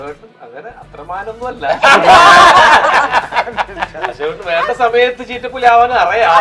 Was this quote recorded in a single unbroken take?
yes; 0 cuts

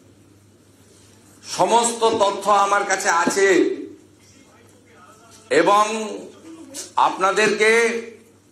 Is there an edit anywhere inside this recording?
no; 0 cuts

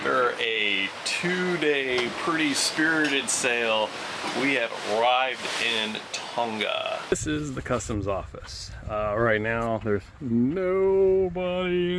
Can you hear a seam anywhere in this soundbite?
yes; 1 cut; at 7.1 s

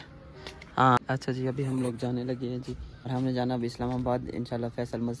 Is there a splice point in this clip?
yes; 2 cuts; at 1.0 s, 3.1 s

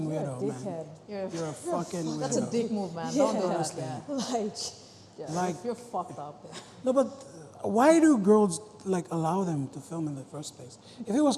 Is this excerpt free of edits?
yes; 0 cuts

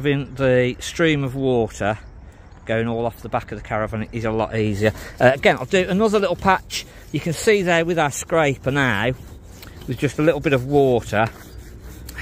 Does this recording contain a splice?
no; 0 cuts

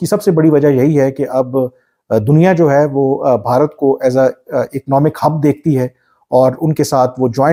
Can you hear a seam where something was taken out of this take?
no; 0 cuts

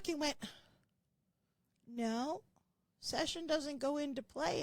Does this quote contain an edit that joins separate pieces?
no; 0 cuts

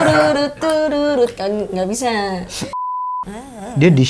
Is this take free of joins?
no; 1 cut; at 3.0 s

